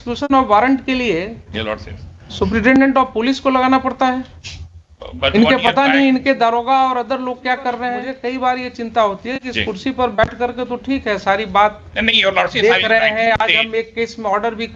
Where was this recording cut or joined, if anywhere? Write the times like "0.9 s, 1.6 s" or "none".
8.1 s

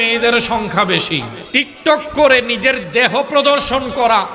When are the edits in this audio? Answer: 1.4 s

